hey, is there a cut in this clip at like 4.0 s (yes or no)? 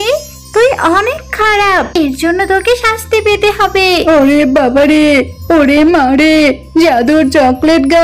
yes